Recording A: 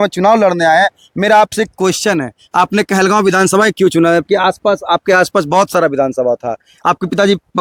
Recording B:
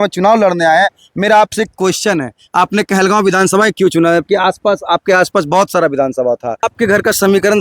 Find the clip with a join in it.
B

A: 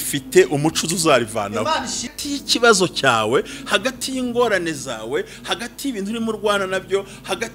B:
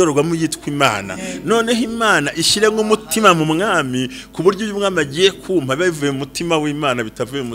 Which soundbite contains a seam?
A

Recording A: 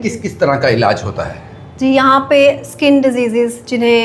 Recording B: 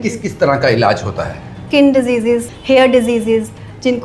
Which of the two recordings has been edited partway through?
B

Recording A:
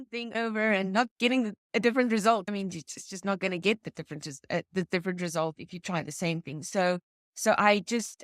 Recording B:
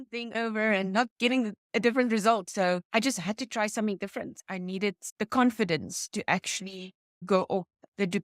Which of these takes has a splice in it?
B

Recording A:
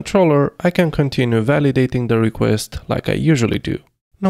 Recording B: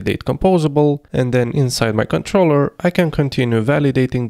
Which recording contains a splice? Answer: B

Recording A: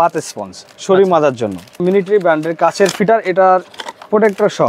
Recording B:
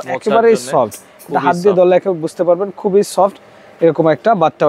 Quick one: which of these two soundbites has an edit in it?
A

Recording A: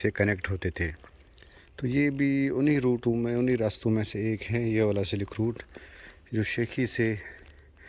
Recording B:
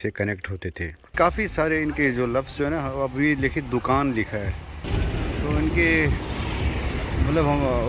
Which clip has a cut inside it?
B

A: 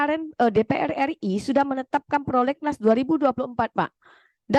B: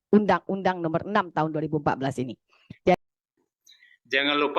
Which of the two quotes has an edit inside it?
B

